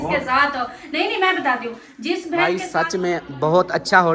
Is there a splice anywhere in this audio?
yes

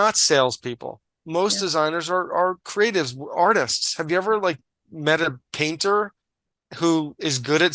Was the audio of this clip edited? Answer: yes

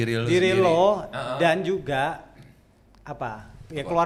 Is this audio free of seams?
yes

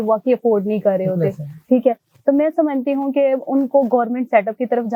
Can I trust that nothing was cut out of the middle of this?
yes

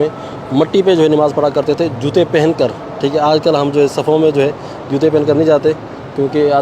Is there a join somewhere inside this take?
no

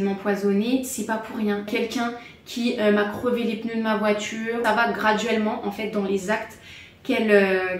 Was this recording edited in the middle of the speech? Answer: yes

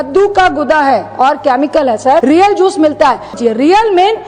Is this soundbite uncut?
no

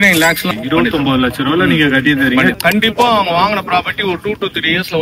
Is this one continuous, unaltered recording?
no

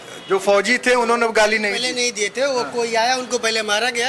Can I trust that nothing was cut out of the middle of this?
yes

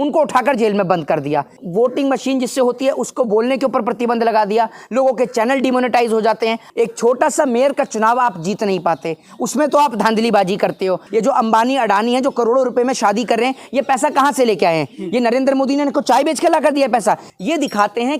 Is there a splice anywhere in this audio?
yes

